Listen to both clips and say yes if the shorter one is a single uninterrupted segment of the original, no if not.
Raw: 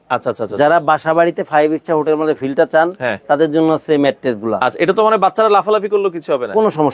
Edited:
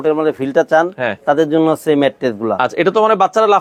yes